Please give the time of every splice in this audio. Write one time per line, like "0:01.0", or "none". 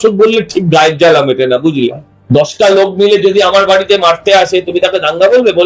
0:02.1